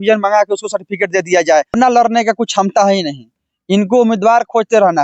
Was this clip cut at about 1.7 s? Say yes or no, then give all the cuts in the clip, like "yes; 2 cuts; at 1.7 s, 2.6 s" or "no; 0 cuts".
yes; 1 cut; at 1.7 s